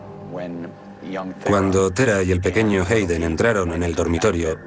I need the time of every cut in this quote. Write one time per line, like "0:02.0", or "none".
0:03.3